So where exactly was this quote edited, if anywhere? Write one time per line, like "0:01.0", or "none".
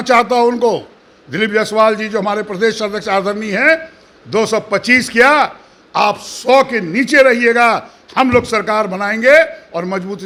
none